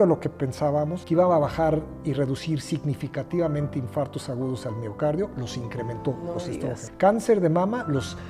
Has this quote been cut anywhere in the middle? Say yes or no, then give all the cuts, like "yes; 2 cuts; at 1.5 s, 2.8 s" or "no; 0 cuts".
yes; 2 cuts; at 0.9 s, 6.8 s